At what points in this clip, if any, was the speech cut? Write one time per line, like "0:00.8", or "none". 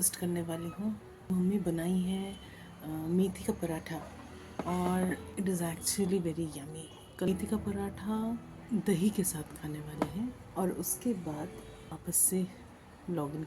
0:01.3
0:05.3
0:07.3
0:08.5
0:10.4
0:12.0